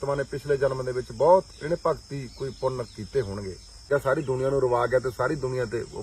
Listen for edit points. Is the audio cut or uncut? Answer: cut